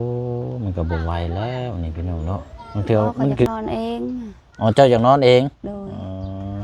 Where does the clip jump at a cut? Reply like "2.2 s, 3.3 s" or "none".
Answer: 3.5 s